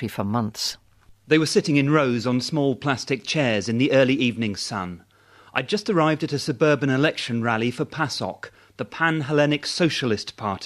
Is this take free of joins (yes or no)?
yes